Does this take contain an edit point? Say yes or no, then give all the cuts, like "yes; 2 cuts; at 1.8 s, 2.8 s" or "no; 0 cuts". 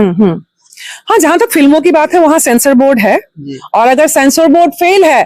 no; 0 cuts